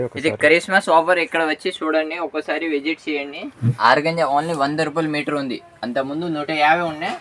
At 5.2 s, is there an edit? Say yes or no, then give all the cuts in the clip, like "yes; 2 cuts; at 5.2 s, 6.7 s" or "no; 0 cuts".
no; 1 cut; at 3.8 s